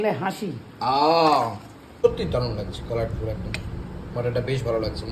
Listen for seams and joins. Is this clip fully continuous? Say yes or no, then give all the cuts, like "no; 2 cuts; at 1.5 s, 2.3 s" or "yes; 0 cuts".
no; 1 cut; at 1.9 s